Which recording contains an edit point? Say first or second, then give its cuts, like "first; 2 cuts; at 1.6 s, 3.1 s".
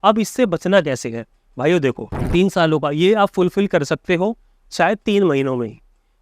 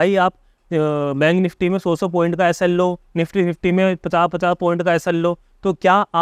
first; 1 cut; at 2.1 s